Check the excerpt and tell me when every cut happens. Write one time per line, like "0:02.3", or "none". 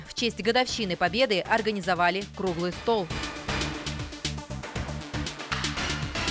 0:03.1
0:05.4